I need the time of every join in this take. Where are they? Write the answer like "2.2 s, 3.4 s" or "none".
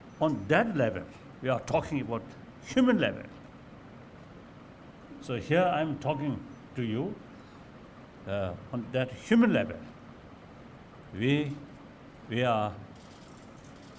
none